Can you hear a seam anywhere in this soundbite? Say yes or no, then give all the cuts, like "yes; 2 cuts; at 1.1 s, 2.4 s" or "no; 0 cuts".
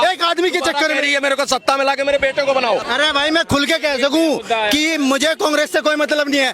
yes; 1 cut; at 2.9 s